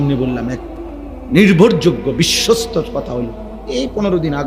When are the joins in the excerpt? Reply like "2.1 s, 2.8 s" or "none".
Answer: none